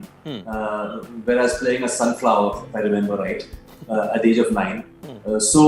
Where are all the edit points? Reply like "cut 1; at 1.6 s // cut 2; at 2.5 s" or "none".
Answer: none